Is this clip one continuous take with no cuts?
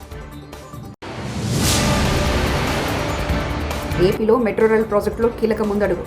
no; 1 cut; at 3.9 s

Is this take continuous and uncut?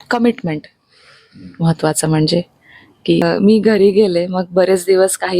no; 1 cut; at 3.2 s

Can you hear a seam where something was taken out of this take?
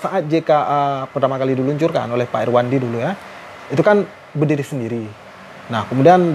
no; 0 cuts

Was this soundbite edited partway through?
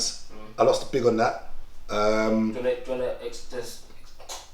no; 0 cuts

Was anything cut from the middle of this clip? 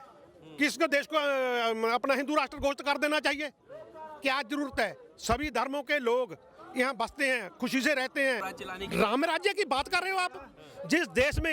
yes; 1 cut; at 8.6 s

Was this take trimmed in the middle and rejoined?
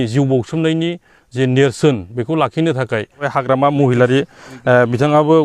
yes; 1 cut; at 3.3 s

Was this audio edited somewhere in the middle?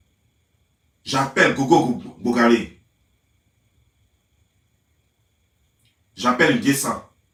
no; 0 cuts

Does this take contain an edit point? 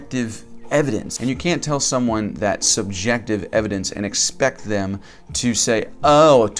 yes; 1 cut; at 1.1 s

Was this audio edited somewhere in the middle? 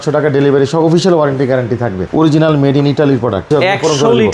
yes; 2 cuts; at 2.0 s, 3.5 s

